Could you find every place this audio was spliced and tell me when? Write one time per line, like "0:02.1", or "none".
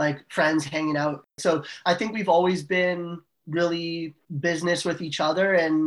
0:01.8
0:04.2